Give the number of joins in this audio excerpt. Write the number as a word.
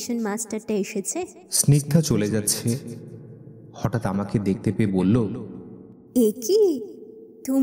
one